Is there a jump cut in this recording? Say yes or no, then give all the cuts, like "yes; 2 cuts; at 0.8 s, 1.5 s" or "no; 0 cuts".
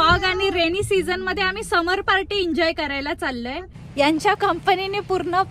yes; 1 cut; at 3.7 s